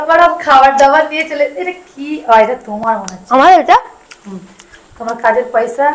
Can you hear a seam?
no; 0 cuts

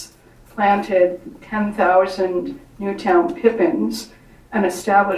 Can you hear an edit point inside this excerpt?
no; 0 cuts

